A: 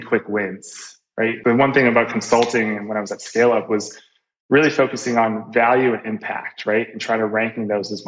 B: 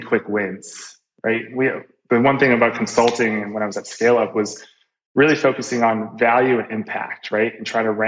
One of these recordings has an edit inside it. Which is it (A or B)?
A